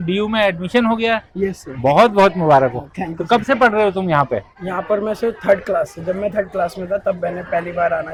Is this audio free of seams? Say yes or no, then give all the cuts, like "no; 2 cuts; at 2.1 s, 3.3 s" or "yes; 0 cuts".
yes; 0 cuts